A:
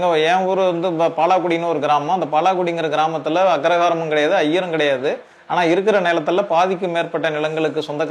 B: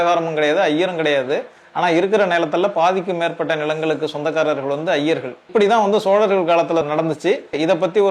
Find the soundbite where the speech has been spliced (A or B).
B